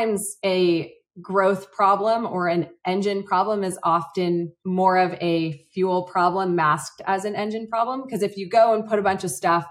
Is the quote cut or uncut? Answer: uncut